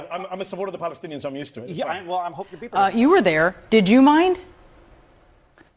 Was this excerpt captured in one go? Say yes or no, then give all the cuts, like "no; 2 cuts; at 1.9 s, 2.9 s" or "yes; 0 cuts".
no; 1 cut; at 2.6 s